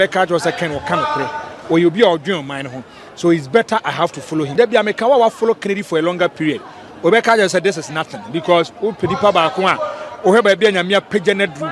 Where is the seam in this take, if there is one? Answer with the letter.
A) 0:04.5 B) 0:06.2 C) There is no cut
A